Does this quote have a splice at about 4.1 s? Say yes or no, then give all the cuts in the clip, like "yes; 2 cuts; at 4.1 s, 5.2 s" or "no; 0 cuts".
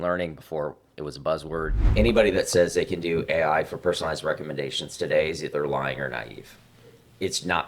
no; 1 cut; at 1.9 s